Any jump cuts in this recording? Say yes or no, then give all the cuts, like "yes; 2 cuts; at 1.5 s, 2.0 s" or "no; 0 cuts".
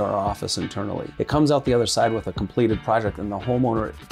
yes; 1 cut; at 1.1 s